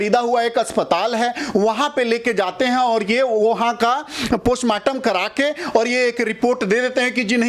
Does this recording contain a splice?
no; 0 cuts

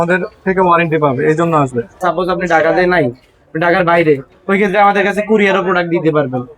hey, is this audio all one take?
no; 1 cut; at 2.0 s

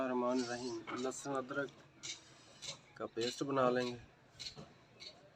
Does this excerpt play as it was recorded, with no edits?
yes; 0 cuts

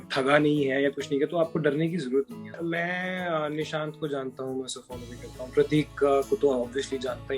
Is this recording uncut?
no; 1 cut; at 2.5 s

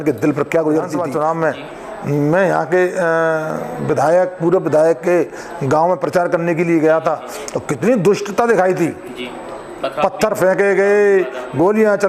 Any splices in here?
yes; 1 cut; at 1.0 s

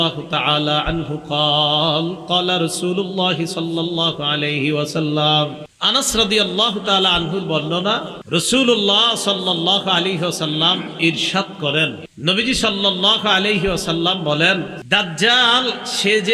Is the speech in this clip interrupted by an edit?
yes; 4 cuts; at 5.7 s, 8.1 s, 12.1 s, 14.8 s

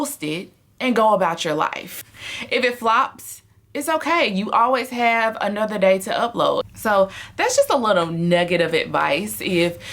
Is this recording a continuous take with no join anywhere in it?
yes; 0 cuts

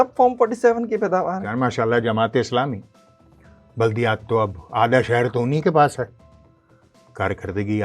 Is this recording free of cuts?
no; 1 cut; at 1.4 s

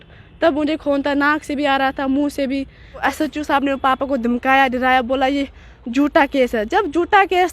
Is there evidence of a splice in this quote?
yes; 1 cut; at 3.0 s

